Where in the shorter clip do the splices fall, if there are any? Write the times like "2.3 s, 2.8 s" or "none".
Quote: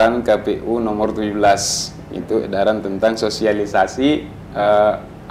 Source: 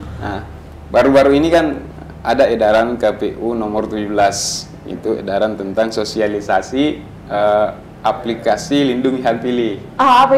none